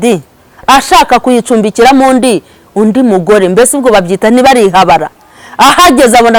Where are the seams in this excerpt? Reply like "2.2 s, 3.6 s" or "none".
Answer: none